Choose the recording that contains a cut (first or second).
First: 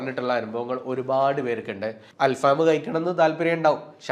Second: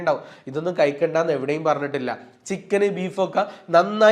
first